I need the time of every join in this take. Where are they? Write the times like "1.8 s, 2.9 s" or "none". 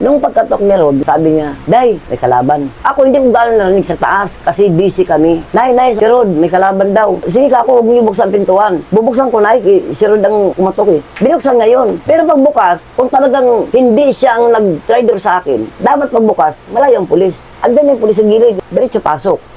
none